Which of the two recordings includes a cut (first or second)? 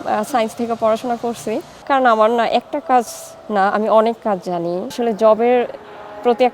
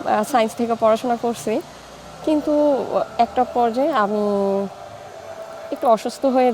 first